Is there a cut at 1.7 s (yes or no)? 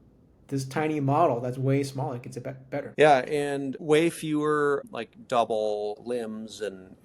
no